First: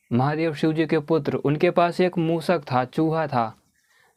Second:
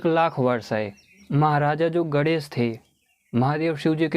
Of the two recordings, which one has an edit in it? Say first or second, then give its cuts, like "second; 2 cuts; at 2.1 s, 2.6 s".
second; 1 cut; at 1.2 s